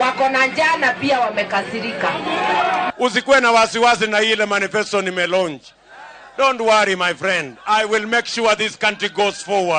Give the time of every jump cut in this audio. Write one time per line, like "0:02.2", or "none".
0:02.9